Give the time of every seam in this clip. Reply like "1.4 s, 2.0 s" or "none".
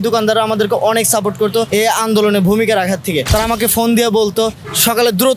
1.7 s, 3.2 s